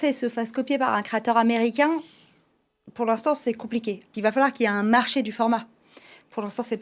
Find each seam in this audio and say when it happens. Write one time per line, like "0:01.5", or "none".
0:04.0

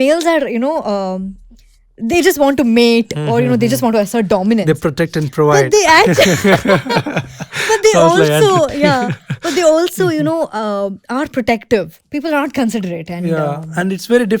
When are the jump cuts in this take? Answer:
0:12.0

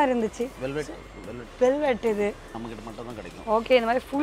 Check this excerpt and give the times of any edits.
0:02.5

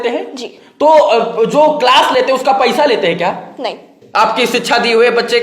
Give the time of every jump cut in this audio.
0:03.9

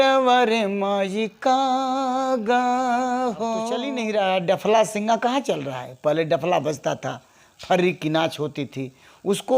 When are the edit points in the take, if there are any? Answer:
0:03.9

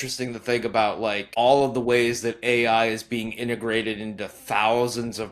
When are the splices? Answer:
0:01.3

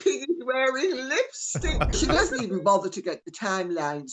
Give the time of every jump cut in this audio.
0:02.0

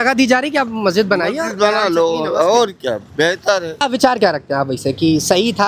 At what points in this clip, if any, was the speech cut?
0:03.7

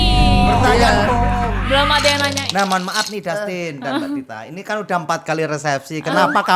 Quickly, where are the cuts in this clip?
0:02.4

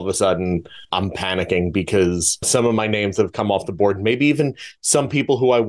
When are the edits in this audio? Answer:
0:00.9
0:02.5

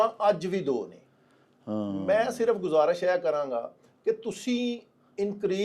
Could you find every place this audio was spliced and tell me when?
none

